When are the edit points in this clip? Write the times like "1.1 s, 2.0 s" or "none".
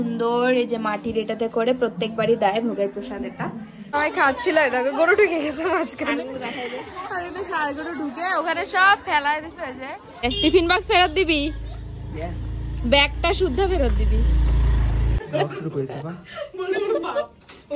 3.7 s, 10.2 s, 15.2 s